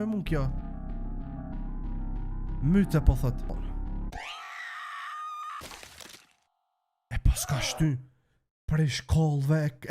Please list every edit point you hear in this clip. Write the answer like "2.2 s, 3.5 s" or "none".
3.5 s